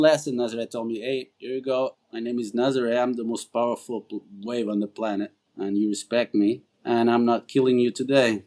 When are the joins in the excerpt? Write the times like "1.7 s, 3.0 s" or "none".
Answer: 1.3 s, 2.0 s, 5.4 s, 6.7 s